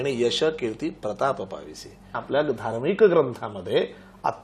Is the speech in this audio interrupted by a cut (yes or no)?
yes